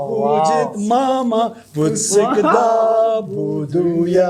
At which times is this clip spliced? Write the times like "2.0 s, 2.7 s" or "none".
none